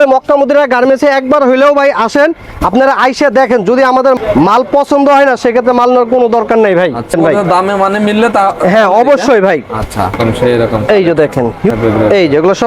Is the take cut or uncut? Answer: cut